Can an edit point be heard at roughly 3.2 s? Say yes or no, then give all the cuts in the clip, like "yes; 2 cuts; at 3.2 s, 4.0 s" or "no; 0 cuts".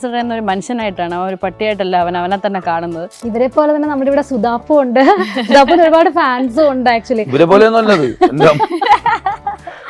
yes; 1 cut; at 3.2 s